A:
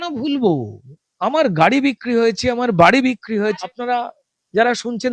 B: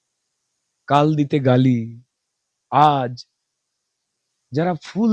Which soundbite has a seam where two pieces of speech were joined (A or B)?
A